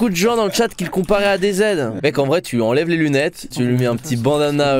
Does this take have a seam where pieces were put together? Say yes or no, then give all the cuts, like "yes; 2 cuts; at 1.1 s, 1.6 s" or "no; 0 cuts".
yes; 2 cuts; at 2.0 s, 3.4 s